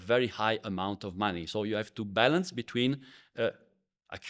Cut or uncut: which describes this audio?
uncut